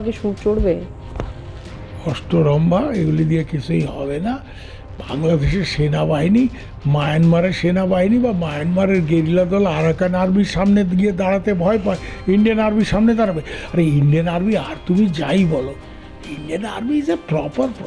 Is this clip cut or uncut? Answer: uncut